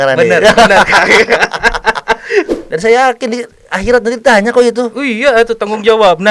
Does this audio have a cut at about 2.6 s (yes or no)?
yes